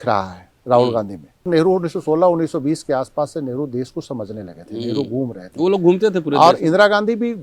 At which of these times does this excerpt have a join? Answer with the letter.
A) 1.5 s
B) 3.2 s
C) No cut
A